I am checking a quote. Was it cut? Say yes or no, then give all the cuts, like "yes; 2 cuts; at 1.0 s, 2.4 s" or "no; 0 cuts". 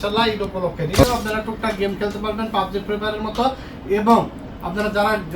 yes; 1 cut; at 1.0 s